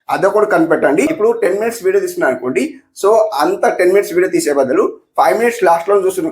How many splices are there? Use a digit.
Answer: 1